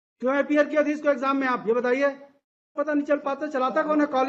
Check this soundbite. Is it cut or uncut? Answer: cut